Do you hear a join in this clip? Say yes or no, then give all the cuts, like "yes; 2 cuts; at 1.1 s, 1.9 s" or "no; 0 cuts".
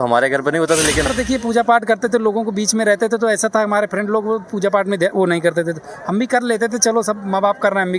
yes; 1 cut; at 1.1 s